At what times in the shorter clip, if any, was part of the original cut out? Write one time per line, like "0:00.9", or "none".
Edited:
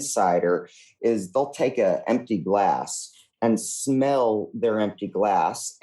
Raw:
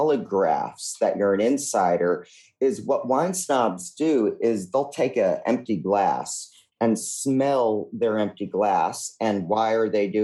0:01.0